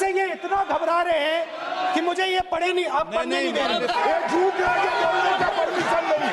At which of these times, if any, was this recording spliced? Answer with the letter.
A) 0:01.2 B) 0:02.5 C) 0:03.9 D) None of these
C